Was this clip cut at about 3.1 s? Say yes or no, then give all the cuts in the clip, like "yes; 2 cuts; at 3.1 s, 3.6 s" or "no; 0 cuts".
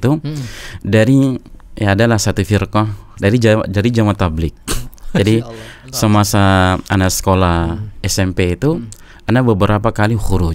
yes; 1 cut; at 3.1 s